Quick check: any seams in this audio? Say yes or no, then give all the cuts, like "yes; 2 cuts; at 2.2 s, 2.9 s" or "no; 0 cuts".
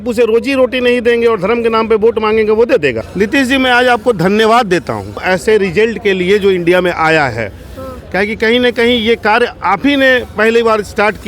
yes; 2 cuts; at 3.0 s, 5.2 s